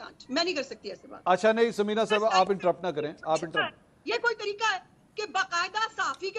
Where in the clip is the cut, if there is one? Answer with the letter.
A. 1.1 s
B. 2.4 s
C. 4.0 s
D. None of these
D